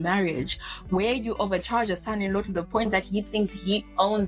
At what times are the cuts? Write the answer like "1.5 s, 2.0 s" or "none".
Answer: none